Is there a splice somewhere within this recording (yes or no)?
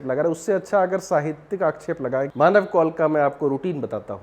yes